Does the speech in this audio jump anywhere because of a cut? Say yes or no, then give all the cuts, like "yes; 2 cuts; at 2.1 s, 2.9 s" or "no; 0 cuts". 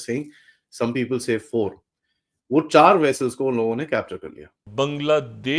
yes; 1 cut; at 4.6 s